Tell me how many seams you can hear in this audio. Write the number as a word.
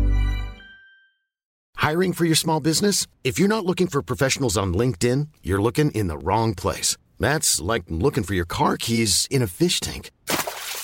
one